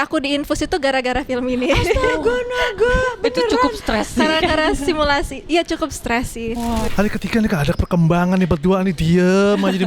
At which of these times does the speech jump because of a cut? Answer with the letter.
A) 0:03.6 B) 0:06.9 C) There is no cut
B